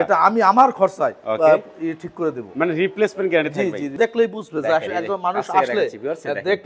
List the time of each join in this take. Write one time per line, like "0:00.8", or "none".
0:03.9